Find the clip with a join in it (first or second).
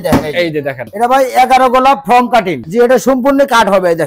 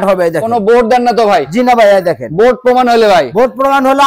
first